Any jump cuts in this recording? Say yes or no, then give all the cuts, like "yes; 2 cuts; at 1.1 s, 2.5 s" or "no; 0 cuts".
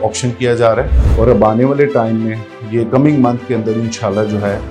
yes; 1 cut; at 1.0 s